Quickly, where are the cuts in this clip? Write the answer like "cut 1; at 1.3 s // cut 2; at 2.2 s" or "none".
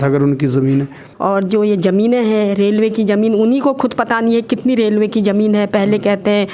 cut 1; at 1.0 s